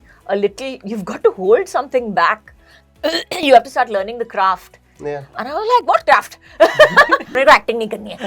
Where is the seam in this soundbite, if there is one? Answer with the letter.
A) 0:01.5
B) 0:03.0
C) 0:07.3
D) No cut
C